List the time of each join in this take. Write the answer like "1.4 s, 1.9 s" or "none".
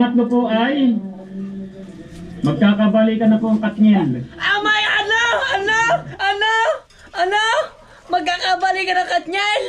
none

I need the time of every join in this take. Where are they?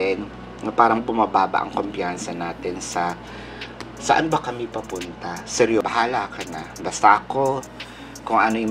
5.8 s

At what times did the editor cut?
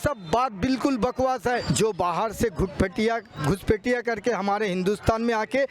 1.7 s

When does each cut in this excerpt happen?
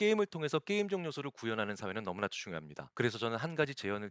2.8 s

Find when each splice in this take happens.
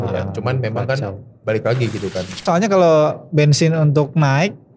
2.4 s

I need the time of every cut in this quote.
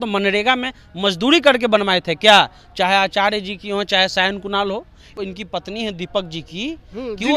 5.2 s

